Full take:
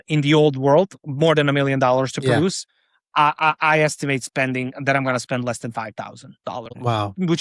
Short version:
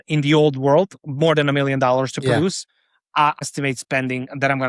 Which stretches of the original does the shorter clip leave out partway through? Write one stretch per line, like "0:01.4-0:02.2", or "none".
0:03.4-0:03.9